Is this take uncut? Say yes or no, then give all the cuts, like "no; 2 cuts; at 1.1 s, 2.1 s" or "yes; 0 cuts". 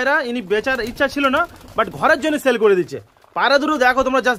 yes; 0 cuts